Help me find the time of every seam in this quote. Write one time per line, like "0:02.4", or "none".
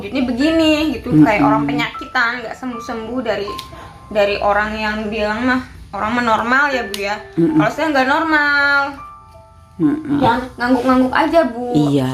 0:10.2

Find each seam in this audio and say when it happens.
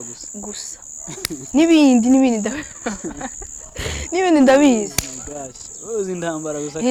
none

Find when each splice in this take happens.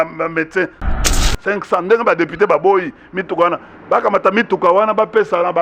0:01.0

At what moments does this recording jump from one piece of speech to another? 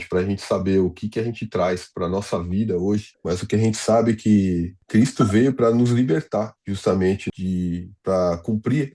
0:03.1
0:04.8
0:06.6
0:07.2

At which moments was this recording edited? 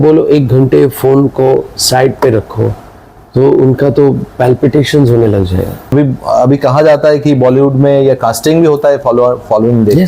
0:05.8

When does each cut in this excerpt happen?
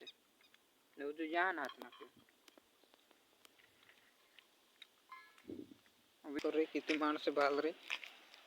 0:06.4

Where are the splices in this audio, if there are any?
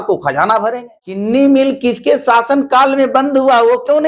0:01.2

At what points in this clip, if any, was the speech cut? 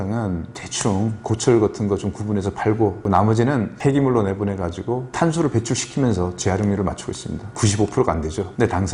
0:03.0
0:05.1

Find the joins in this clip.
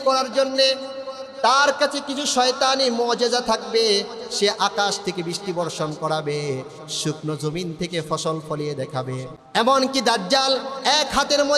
0:09.4

